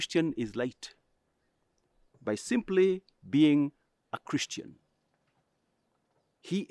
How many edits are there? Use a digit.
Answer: 0